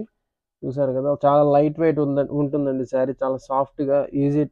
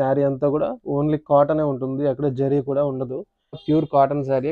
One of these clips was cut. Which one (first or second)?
second